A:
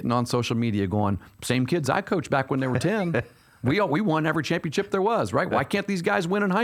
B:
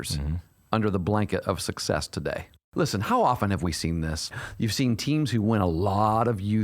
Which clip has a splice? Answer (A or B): B